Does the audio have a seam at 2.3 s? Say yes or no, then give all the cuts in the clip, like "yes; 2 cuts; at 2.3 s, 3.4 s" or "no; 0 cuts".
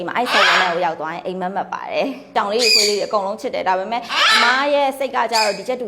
yes; 1 cut; at 2.3 s